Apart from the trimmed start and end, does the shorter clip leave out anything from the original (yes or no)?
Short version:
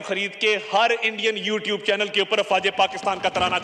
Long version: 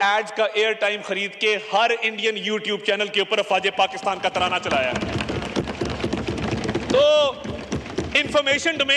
no